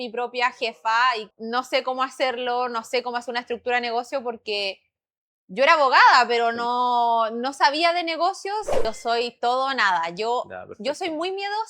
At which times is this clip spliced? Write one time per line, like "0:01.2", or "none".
0:01.3
0:08.8